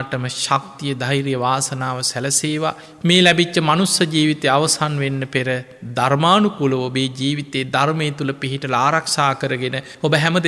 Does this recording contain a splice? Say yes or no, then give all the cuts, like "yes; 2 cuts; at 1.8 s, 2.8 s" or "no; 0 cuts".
no; 0 cuts